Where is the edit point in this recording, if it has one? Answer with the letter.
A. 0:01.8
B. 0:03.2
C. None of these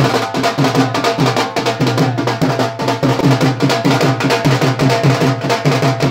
B